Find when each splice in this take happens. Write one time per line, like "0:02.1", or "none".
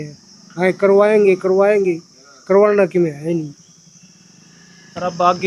none